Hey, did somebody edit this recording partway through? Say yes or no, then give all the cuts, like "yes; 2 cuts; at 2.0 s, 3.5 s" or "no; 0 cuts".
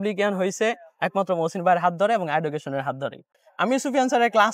yes; 1 cut; at 3.4 s